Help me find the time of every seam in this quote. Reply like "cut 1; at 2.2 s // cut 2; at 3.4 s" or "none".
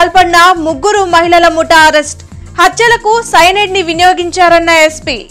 none